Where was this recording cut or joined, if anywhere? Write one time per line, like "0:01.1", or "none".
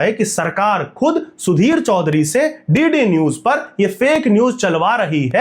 none